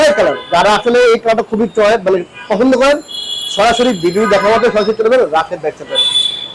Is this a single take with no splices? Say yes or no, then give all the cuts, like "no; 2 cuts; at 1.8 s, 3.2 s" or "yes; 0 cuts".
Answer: yes; 0 cuts